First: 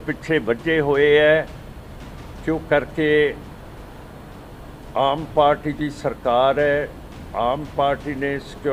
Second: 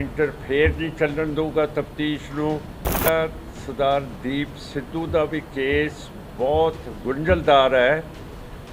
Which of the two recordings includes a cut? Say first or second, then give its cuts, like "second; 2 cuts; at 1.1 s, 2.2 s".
second; 1 cut; at 3.1 s